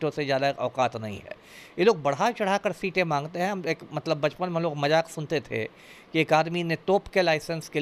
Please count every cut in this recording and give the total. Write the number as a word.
zero